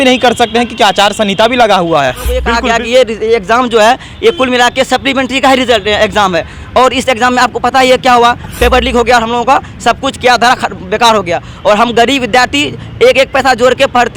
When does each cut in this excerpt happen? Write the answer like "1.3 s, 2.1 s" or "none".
2.5 s

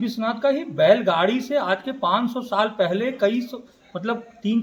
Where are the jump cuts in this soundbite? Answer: none

